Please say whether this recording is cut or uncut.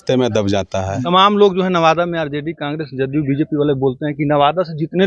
cut